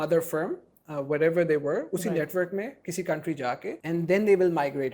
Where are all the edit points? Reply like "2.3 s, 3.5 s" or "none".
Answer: 3.8 s

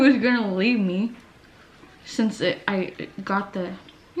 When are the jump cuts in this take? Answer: none

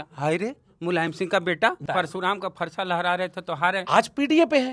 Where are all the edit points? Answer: 1.8 s

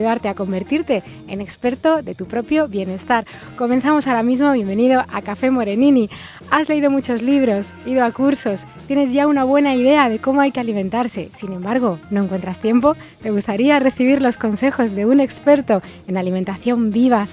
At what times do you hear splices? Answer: none

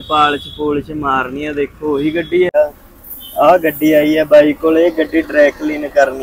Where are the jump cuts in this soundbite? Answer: 2.5 s

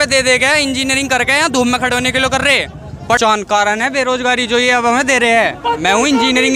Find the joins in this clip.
3.2 s

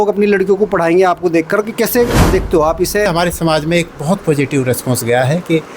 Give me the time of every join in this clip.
3.1 s

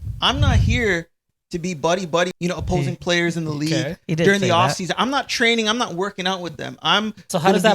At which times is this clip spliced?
2.3 s

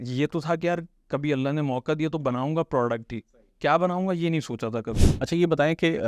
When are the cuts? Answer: 5.0 s

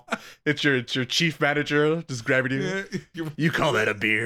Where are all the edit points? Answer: none

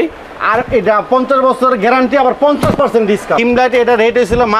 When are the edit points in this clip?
3.4 s

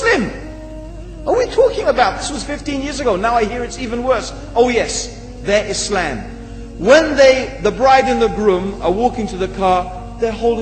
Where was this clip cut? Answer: 5.5 s

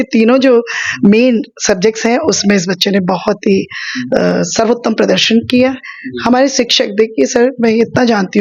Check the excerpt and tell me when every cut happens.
none

